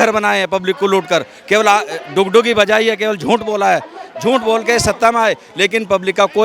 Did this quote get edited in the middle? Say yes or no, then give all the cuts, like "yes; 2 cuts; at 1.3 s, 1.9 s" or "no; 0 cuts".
no; 0 cuts